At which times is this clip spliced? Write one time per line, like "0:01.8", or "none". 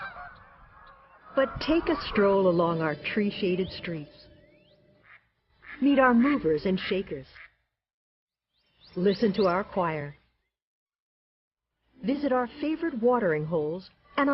0:02.9